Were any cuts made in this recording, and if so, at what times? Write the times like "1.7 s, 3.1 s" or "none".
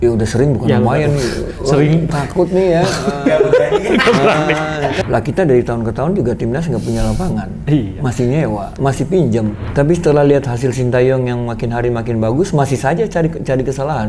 5.0 s, 9.6 s

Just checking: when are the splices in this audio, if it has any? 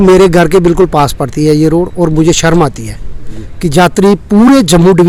none

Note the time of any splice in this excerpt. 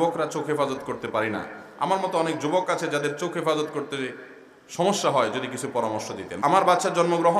6.3 s

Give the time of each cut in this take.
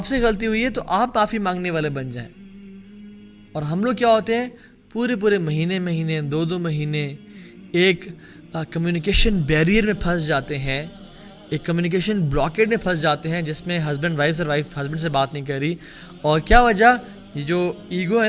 none

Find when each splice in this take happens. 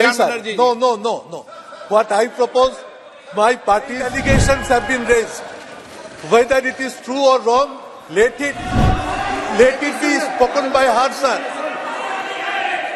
4.1 s, 8.6 s

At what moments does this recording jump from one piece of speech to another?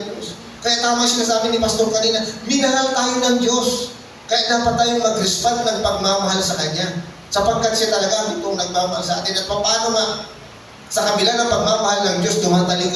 none

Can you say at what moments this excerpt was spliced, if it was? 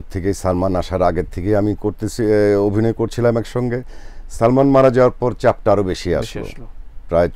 none

